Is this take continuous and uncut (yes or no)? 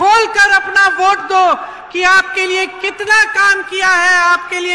yes